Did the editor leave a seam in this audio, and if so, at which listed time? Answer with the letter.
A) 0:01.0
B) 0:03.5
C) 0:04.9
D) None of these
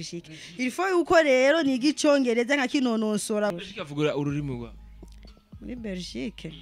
B